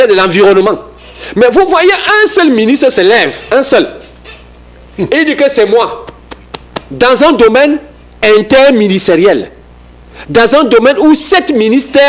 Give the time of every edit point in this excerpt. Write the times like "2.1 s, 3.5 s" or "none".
none

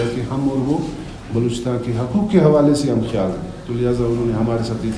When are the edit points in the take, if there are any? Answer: none

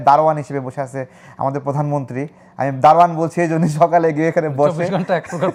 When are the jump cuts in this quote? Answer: none

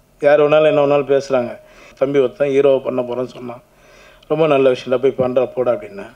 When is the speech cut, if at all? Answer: 1.9 s

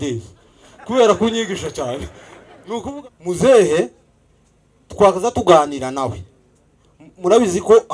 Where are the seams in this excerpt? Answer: 2.8 s

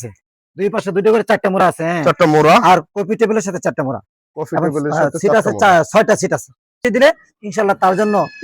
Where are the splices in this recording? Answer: 6.8 s

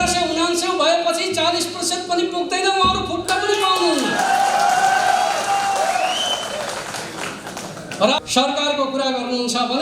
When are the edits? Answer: 8.2 s

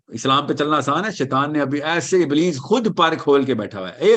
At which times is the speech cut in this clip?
none

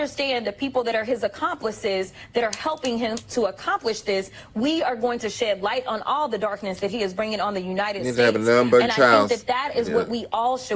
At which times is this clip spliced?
none

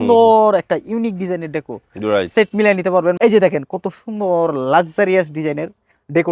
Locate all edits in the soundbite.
3.2 s

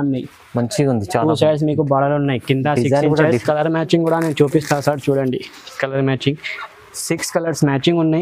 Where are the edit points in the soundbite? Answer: 3.4 s

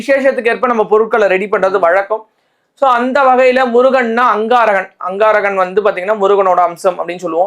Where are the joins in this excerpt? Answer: none

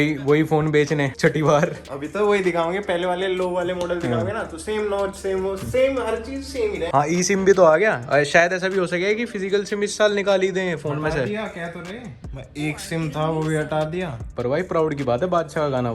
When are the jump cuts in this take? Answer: 6.9 s, 14.3 s

